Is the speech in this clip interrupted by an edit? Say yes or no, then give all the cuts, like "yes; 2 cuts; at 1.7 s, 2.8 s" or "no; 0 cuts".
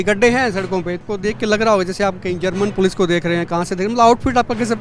yes; 1 cut; at 1.0 s